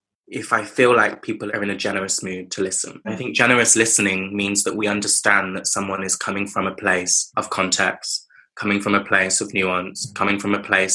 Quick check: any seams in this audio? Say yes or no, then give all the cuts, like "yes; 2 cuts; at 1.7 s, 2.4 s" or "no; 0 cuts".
yes; 3 cuts; at 1.4 s, 3.1 s, 7.2 s